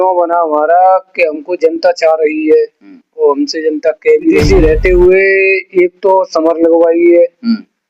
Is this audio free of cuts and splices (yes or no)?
no